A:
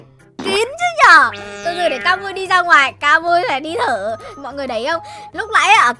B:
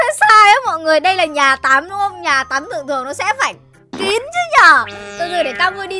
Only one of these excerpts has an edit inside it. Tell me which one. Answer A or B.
A